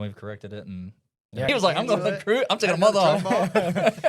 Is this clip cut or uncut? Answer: cut